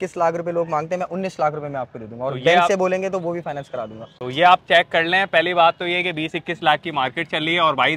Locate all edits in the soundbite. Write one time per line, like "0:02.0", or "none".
none